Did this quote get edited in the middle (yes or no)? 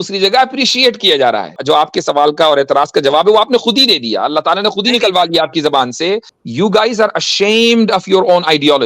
yes